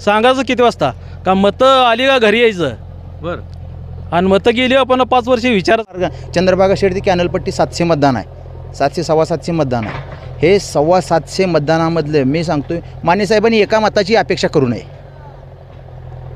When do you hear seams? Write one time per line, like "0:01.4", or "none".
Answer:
0:05.9